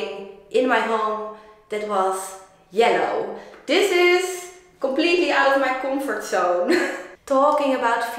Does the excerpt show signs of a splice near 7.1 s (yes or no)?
yes